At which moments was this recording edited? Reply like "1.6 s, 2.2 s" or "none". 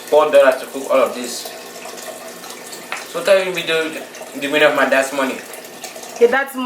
2.4 s